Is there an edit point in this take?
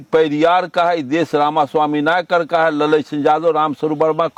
no; 0 cuts

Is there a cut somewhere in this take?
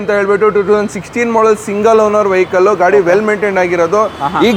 no; 0 cuts

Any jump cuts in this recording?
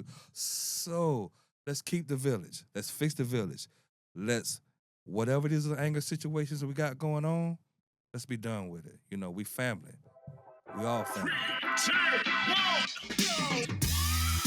yes; 1 cut; at 11.5 s

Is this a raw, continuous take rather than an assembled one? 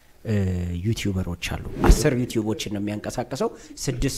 no; 1 cut; at 1.7 s

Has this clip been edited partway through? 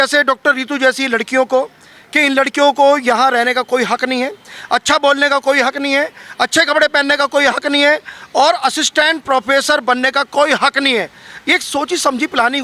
no; 0 cuts

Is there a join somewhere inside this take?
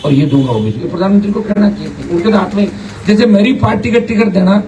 no; 0 cuts

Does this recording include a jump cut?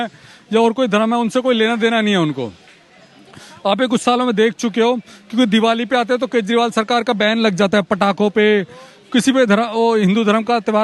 no; 0 cuts

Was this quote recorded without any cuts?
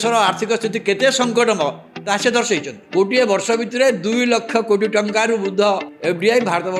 yes; 0 cuts

